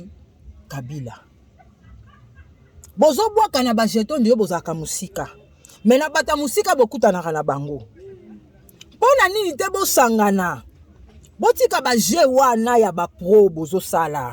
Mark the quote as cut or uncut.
uncut